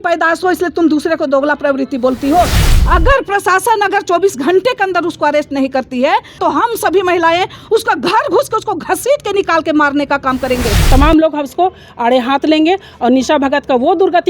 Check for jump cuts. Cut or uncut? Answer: cut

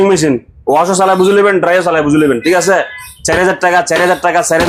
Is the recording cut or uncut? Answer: uncut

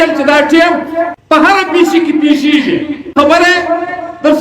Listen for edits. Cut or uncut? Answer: cut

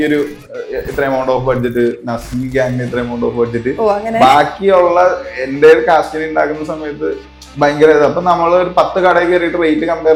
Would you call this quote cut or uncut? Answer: uncut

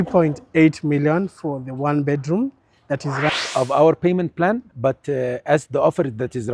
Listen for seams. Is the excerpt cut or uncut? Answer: cut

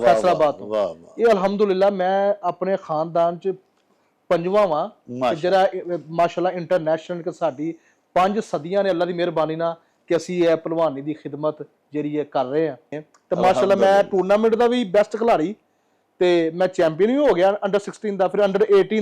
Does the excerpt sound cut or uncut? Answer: cut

